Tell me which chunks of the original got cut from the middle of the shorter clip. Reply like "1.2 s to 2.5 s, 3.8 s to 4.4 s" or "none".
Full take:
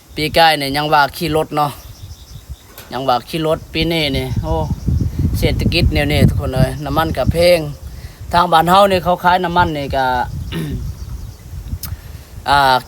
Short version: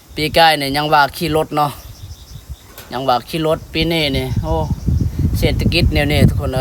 none